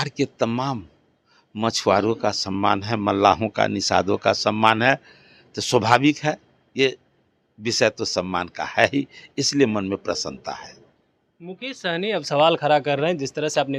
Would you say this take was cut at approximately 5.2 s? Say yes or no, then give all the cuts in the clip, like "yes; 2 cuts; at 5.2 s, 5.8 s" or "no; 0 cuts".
no; 0 cuts